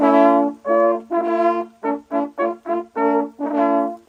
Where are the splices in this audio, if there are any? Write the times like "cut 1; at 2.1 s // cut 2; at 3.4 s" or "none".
none